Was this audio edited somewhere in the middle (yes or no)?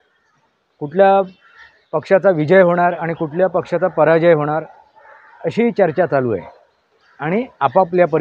no